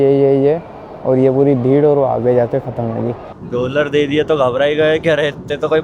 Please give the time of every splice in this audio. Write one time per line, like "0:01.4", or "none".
0:03.3